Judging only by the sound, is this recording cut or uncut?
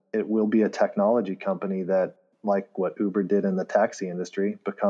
uncut